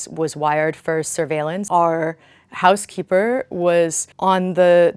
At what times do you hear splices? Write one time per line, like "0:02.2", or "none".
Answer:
0:01.6